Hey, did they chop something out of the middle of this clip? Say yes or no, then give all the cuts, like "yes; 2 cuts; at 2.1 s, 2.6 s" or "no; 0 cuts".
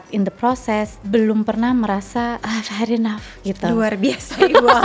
yes; 2 cuts; at 1.0 s, 2.4 s